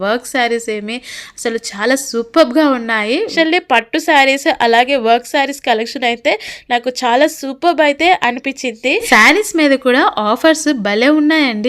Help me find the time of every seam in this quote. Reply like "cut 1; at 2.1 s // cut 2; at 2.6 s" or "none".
cut 1; at 3.3 s // cut 2; at 9.1 s